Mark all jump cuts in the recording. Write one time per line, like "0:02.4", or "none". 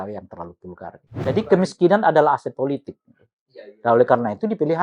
0:01.2